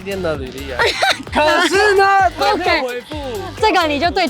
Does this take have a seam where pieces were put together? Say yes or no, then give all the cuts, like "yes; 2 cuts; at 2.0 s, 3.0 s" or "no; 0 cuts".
yes; 1 cut; at 1.2 s